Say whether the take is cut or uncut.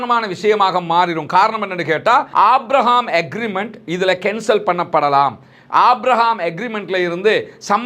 cut